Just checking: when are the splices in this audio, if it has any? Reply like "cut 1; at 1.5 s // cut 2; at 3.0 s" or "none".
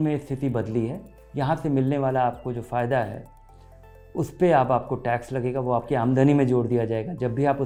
none